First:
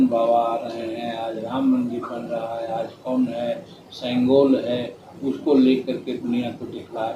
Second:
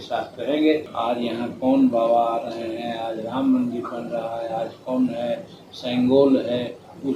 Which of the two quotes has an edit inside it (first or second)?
second